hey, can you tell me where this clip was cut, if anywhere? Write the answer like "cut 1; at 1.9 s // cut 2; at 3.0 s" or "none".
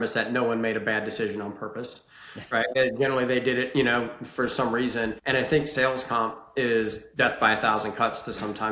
cut 1; at 2.7 s // cut 2; at 5.2 s